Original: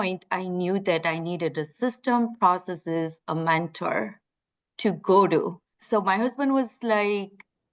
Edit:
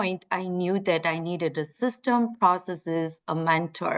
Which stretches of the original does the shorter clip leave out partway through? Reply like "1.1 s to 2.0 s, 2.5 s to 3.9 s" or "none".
none